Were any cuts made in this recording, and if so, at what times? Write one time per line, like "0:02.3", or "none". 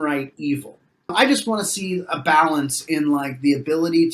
0:01.1